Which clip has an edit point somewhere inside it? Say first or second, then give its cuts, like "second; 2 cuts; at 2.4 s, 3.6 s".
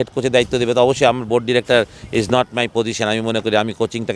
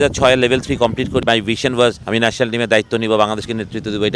second; 2 cuts; at 1.2 s, 2.0 s